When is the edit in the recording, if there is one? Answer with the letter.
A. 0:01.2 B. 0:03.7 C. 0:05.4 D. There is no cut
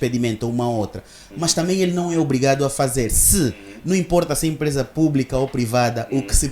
B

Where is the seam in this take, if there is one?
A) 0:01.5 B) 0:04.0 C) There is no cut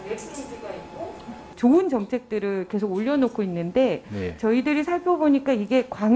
A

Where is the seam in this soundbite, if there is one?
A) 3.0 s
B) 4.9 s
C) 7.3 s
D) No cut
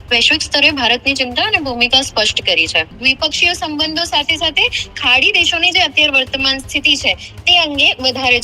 A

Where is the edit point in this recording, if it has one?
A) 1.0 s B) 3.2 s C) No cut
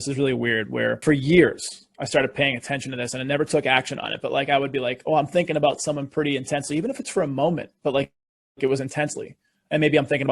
A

